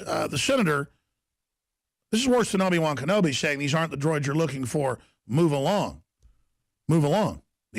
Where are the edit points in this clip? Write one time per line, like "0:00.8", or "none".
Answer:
none